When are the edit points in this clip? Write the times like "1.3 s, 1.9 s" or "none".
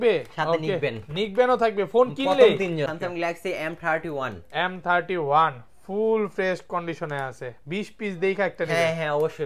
2.9 s